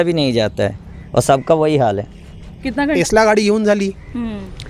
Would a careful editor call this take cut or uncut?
cut